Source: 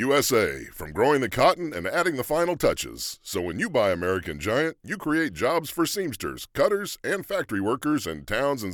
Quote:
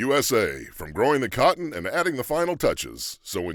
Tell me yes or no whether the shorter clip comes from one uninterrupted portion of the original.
yes